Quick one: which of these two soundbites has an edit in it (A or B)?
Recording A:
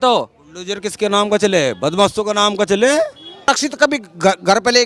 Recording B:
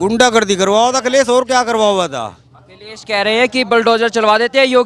A